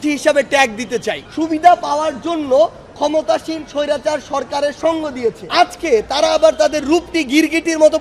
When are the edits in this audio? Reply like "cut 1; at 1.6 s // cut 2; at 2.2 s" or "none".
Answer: cut 1; at 1.2 s // cut 2; at 5.4 s